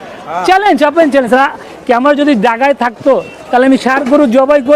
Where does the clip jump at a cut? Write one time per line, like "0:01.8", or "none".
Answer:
0:01.7